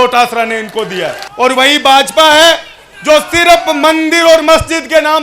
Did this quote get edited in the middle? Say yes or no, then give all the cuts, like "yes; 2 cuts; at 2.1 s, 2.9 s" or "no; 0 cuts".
yes; 1 cut; at 1.2 s